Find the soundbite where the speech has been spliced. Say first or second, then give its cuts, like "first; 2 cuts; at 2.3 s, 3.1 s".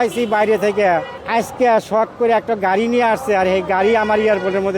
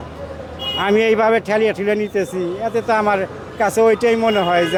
first; 1 cut; at 1.2 s